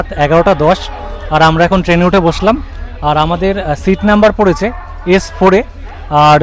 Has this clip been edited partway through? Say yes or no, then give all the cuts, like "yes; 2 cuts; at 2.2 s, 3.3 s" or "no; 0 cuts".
no; 0 cuts